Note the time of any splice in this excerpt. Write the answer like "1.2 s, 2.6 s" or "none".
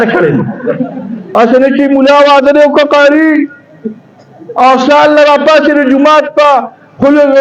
1.2 s